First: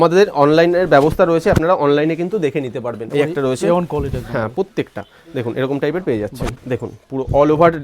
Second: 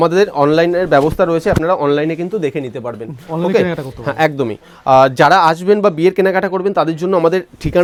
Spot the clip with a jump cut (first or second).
first